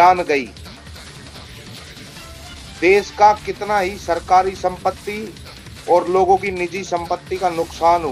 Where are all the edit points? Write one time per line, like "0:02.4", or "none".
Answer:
0:01.2
0:02.8